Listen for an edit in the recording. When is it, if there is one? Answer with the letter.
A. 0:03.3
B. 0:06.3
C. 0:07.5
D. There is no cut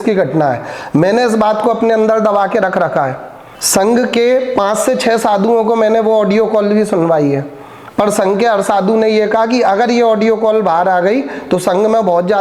D